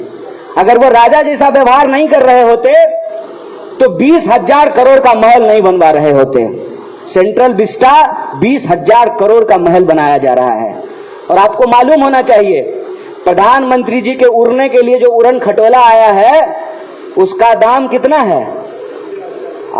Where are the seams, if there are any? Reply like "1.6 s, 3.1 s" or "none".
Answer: none